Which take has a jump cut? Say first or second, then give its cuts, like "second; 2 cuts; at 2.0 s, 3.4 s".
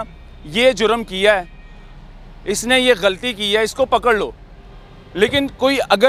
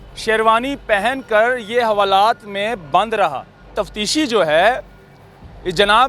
second; 1 cut; at 3.8 s